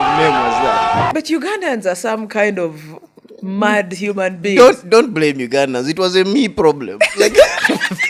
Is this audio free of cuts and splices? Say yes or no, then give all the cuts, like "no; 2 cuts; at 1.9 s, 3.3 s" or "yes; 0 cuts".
no; 1 cut; at 1.1 s